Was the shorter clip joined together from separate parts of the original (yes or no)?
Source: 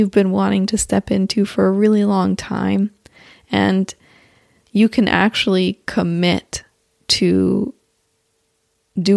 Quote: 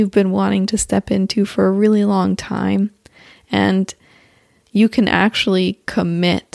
no